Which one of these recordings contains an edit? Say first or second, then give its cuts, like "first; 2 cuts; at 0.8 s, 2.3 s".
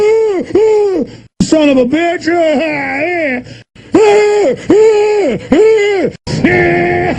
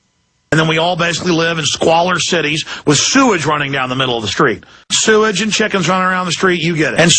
first; 2 cuts; at 1.0 s, 4.6 s